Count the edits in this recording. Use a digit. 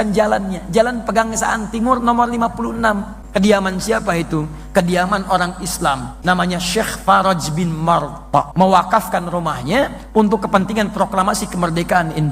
3